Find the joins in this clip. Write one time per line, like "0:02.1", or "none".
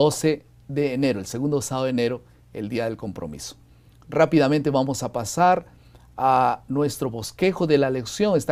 none